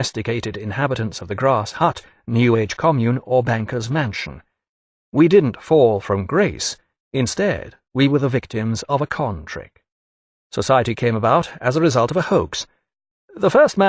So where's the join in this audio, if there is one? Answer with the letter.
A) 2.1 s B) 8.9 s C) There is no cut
A